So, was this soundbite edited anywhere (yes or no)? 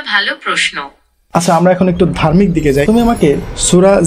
yes